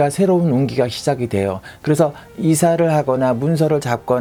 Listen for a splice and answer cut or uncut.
uncut